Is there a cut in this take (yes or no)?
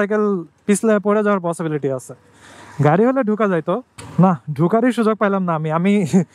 no